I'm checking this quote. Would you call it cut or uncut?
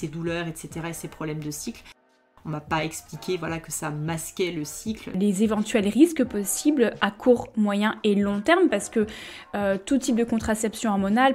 cut